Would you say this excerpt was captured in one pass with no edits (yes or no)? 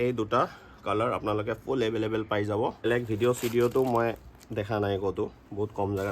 no